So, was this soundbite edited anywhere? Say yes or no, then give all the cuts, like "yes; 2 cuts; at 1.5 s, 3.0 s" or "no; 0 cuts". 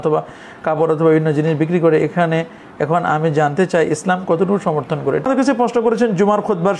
yes; 1 cut; at 5.2 s